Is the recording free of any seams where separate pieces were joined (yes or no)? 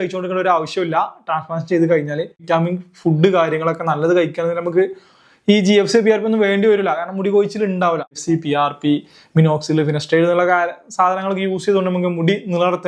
no